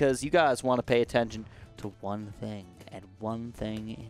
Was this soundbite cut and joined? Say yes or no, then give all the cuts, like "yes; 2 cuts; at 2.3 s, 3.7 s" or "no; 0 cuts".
no; 0 cuts